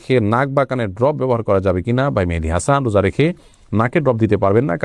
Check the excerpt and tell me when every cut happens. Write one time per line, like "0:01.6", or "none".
none